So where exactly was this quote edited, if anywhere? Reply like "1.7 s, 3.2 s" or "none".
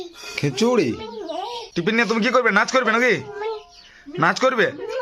1.6 s